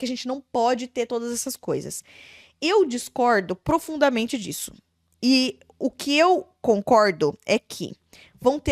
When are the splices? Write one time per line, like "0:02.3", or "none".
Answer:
none